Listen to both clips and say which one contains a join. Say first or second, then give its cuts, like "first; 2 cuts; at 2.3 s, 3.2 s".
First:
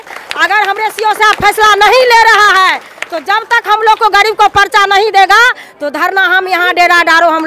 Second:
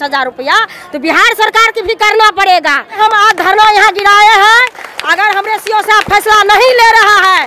second; 1 cut; at 3.0 s